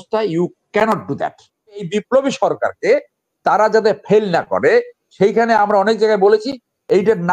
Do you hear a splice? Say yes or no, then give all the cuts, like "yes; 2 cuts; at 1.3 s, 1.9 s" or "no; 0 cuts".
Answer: yes; 1 cut; at 1.9 s